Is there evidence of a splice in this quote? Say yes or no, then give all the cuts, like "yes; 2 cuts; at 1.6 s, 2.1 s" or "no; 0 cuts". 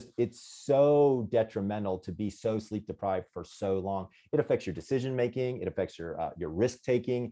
no; 0 cuts